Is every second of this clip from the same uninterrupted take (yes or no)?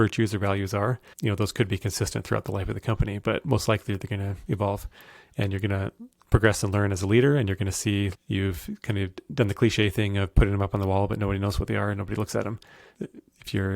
no